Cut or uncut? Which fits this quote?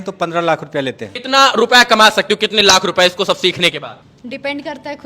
cut